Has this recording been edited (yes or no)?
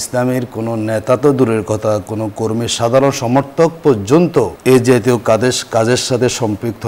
yes